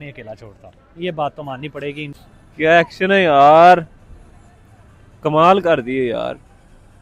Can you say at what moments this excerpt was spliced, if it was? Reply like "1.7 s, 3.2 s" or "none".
none